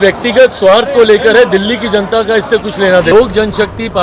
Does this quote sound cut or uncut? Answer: cut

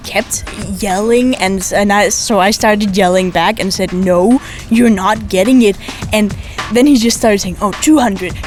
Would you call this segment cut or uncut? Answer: uncut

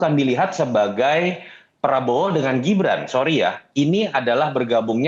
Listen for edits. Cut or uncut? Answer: uncut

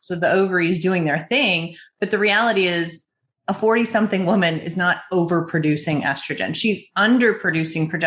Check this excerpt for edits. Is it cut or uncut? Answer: uncut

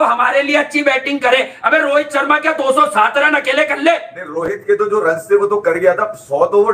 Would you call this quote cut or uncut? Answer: uncut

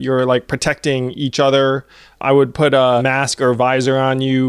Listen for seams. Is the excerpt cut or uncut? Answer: cut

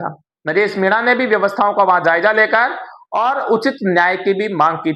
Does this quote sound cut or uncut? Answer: uncut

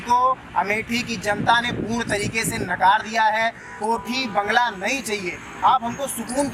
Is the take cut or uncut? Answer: uncut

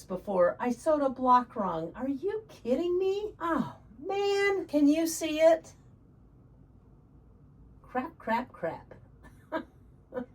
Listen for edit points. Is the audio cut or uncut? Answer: cut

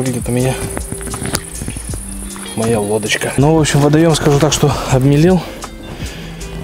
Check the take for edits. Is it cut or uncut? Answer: cut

